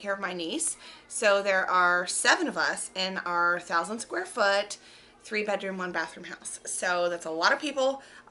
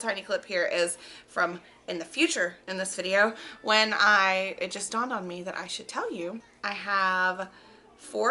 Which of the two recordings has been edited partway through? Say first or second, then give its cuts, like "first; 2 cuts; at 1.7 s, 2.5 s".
second; 1 cut; at 6.5 s